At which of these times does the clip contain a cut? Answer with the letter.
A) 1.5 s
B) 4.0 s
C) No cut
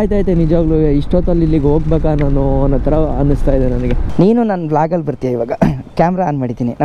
B